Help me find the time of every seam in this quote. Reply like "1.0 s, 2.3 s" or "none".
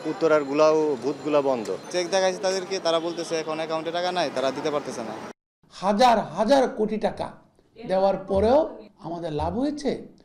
1.8 s, 5.4 s